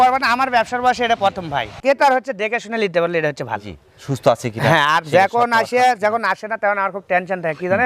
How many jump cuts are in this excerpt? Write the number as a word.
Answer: one